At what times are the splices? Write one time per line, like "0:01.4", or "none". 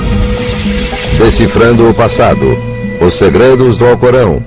0:01.6